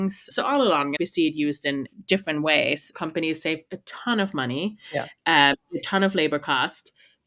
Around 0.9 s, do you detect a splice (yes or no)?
yes